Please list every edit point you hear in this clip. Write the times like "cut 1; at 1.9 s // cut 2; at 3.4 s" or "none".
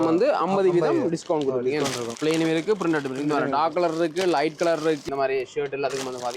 cut 1; at 2.1 s // cut 2; at 5.0 s